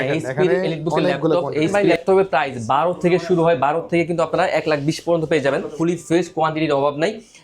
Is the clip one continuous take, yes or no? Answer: no